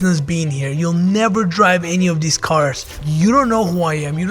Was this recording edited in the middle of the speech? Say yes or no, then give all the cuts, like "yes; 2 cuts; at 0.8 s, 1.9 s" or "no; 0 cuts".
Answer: yes; 1 cut; at 2.9 s